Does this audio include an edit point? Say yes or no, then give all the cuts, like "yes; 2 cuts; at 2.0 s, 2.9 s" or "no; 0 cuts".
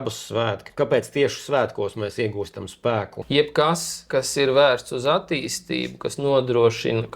no; 0 cuts